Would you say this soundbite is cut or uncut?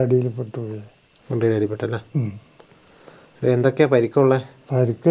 uncut